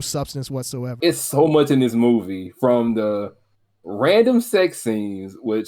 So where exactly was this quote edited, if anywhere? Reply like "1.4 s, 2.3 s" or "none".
1.0 s